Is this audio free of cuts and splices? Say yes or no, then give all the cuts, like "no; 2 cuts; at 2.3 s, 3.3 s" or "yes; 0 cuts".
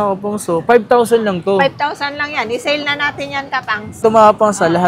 no; 1 cut; at 3.9 s